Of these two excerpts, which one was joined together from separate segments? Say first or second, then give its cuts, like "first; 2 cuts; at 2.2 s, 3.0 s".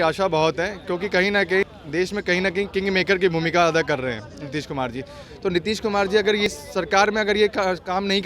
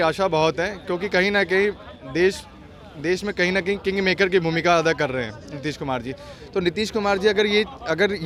first; 2 cuts; at 1.6 s, 6.5 s